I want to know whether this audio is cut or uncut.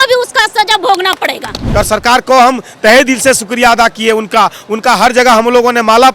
cut